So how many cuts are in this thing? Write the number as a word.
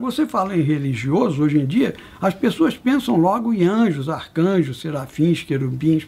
zero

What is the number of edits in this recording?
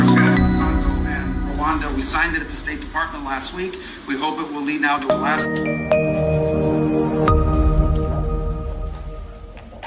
zero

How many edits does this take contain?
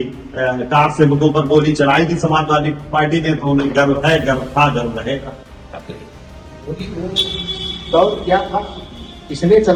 zero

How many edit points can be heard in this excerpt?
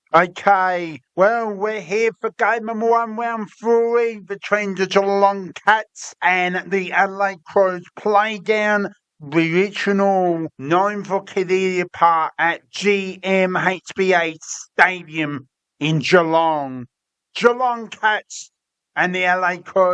one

